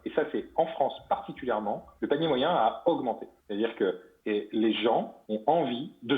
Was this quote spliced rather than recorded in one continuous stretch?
yes; 4 cuts; at 1.9 s, 3.3 s, 4.1 s, 5.2 s

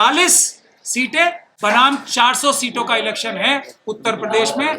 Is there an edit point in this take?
yes; 1 cut; at 1.5 s

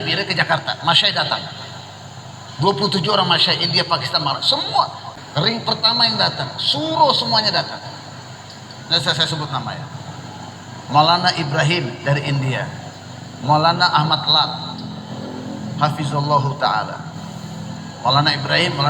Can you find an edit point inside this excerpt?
yes; 1 cut; at 5.1 s

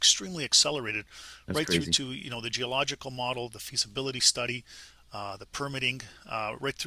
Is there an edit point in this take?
no; 0 cuts

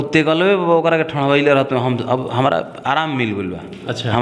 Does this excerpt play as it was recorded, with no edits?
yes; 0 cuts

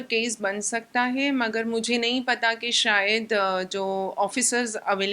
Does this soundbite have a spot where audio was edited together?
no; 0 cuts

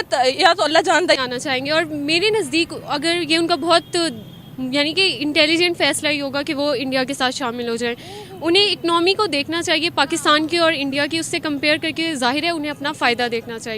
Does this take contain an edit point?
yes; 1 cut; at 1.2 s

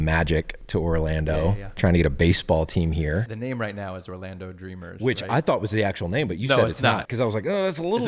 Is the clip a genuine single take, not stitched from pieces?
no; 2 cuts; at 3.3 s, 7.1 s

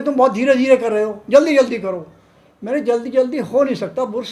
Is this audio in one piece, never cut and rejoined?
yes; 0 cuts

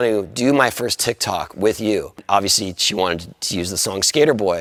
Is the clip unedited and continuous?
yes; 0 cuts

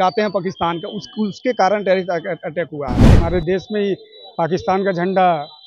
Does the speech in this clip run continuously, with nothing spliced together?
no; 1 cut; at 3.2 s

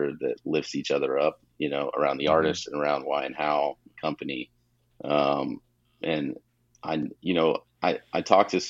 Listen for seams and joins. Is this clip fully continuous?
yes; 0 cuts

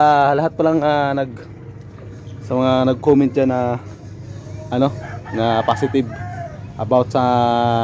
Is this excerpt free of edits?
yes; 0 cuts

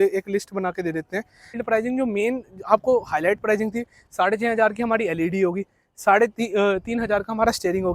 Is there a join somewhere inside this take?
yes; 1 cut; at 1.6 s

